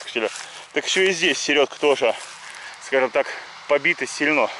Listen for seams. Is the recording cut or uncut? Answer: cut